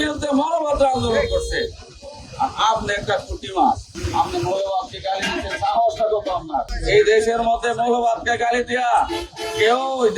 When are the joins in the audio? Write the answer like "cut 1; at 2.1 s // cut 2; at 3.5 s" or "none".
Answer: cut 1; at 3.9 s // cut 2; at 6.8 s

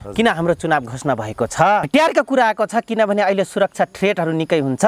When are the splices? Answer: cut 1; at 1.9 s

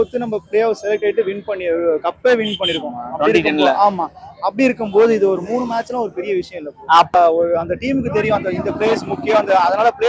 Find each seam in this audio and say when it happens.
cut 1; at 7.1 s

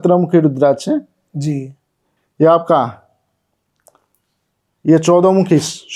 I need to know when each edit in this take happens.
none

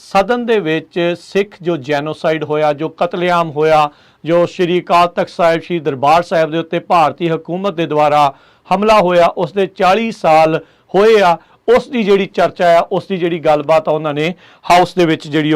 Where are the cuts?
none

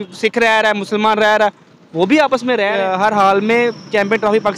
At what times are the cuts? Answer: cut 1; at 2.7 s

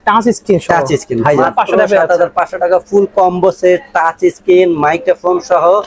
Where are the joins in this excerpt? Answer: cut 1; at 1.4 s

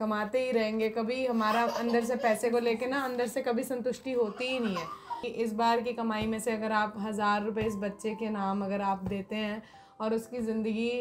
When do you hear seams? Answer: cut 1; at 5.3 s

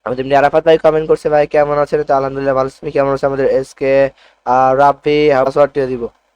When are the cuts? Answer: cut 1; at 5.4 s

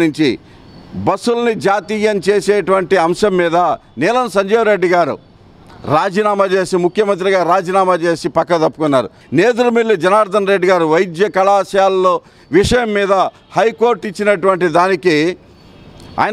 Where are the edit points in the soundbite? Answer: cut 1; at 9.2 s

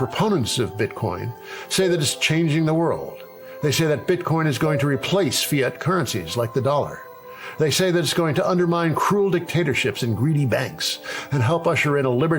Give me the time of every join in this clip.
none

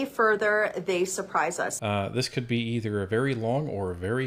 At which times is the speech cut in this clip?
cut 1; at 1.8 s

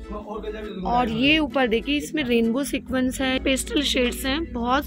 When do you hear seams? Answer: cut 1; at 3.4 s

